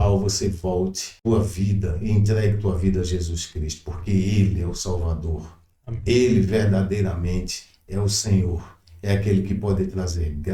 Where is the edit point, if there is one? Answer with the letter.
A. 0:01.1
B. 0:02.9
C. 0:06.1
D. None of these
A